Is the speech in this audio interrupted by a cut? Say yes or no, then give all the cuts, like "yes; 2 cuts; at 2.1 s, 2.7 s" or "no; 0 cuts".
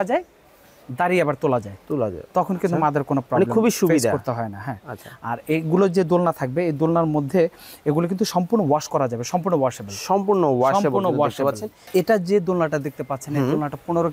yes; 1 cut; at 11.9 s